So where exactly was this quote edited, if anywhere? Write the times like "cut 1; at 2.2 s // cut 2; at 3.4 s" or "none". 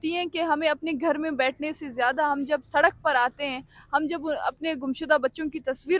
none